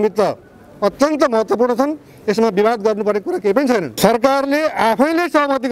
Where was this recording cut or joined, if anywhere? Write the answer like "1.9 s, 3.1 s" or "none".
3.9 s